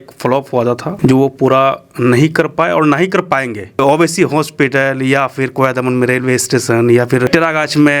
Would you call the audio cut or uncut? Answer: cut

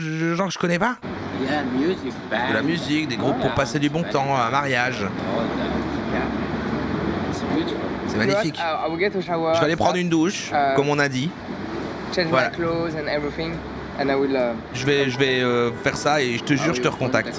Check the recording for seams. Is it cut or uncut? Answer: cut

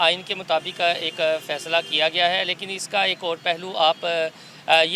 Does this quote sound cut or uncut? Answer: uncut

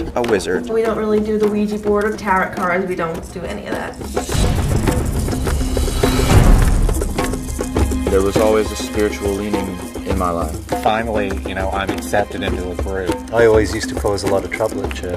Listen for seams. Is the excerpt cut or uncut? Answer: cut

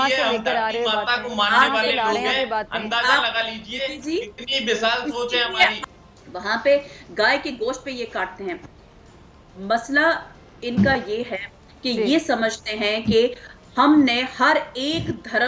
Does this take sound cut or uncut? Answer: cut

